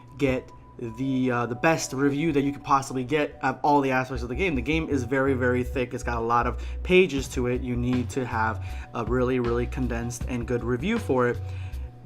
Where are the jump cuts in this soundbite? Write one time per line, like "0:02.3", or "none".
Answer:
none